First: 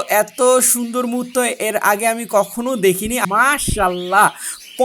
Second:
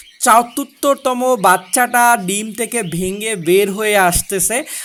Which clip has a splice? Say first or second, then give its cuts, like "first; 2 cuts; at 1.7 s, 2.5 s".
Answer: first; 1 cut; at 3.2 s